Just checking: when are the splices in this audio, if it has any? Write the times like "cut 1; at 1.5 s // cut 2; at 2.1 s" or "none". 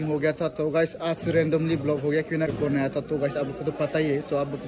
cut 1; at 2.5 s